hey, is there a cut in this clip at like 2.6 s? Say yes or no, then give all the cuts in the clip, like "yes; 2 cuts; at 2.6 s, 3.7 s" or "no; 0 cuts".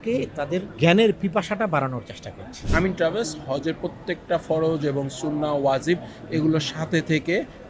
yes; 1 cut; at 2.6 s